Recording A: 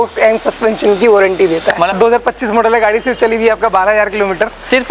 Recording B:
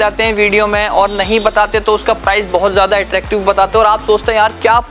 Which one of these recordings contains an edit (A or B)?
A